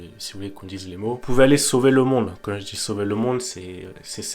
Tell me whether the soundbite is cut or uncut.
cut